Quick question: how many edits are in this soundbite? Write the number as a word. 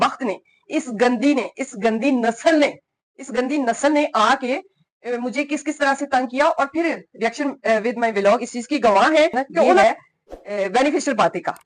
one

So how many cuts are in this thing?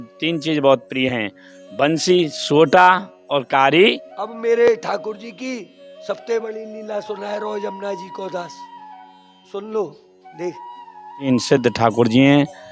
two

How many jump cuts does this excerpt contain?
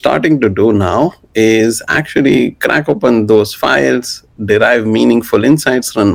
zero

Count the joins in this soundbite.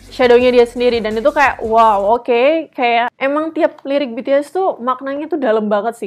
one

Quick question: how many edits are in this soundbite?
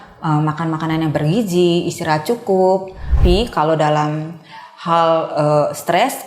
one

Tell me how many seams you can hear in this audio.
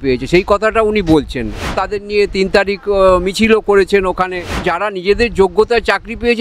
two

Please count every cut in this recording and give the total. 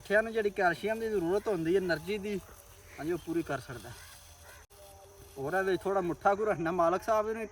one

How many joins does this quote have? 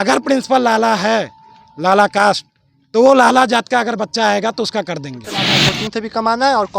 one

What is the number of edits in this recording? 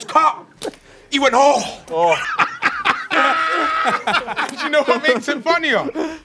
two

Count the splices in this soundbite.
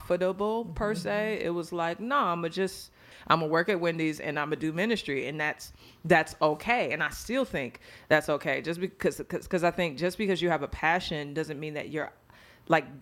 one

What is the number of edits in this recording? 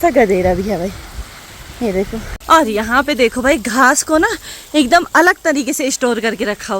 one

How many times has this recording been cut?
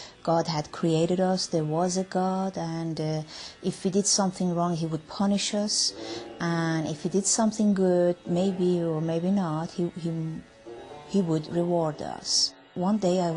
one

